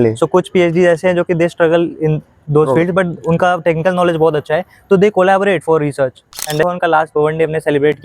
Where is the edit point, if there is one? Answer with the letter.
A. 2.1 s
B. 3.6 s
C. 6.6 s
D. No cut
C